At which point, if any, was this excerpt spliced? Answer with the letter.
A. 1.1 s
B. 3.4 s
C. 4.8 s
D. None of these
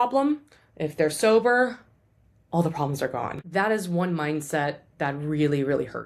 B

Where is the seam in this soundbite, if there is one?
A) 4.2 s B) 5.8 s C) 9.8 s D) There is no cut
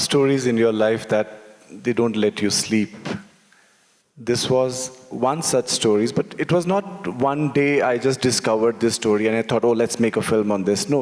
D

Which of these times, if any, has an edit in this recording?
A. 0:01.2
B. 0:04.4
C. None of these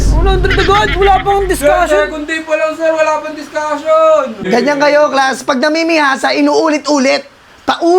B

